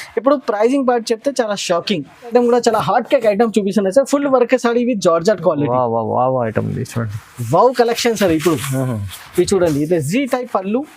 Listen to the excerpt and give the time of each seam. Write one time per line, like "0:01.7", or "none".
0:02.3